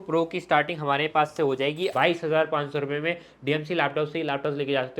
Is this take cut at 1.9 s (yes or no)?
yes